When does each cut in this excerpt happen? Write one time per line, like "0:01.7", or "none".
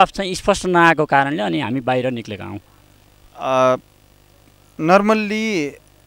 none

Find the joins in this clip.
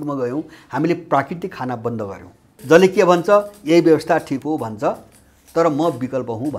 0:02.6

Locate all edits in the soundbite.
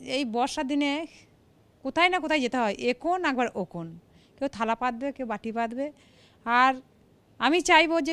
none

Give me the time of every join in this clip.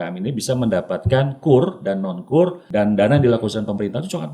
0:02.6

